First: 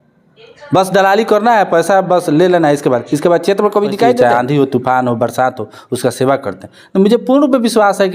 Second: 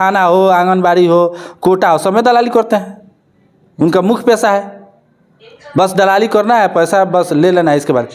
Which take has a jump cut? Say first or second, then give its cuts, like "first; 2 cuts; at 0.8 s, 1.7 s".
first; 1 cut; at 4.2 s